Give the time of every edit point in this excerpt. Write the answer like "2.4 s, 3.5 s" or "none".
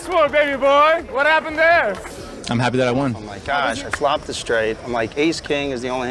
3.3 s